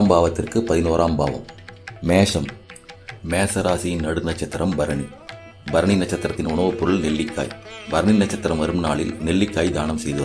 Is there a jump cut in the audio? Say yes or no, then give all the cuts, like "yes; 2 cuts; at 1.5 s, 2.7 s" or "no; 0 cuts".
yes; 1 cut; at 1.8 s